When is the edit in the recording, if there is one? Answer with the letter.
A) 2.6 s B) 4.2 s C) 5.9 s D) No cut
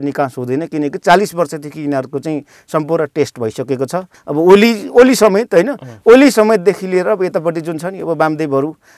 B